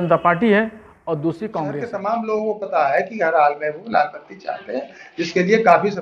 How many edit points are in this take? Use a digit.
1